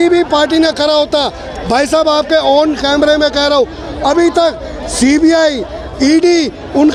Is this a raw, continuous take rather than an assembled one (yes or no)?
yes